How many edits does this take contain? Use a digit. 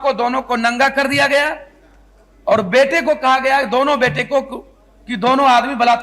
0